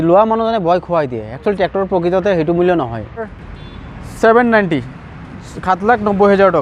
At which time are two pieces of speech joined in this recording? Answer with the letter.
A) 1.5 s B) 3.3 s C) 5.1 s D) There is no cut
B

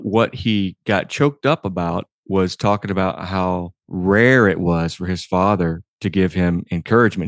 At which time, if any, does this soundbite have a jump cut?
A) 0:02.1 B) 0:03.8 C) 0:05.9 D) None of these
B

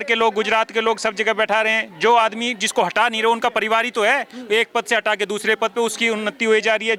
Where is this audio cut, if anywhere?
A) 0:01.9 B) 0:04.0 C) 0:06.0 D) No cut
D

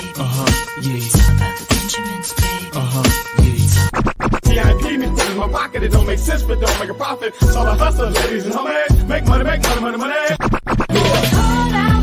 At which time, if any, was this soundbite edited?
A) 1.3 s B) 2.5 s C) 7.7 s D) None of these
A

